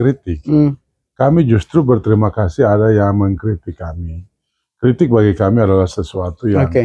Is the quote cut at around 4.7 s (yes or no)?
no